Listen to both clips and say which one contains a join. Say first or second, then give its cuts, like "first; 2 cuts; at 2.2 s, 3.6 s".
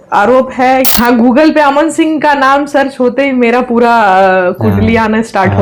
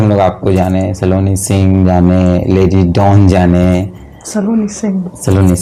first; 1 cut; at 0.9 s